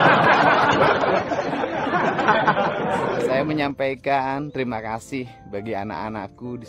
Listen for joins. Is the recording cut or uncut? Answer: cut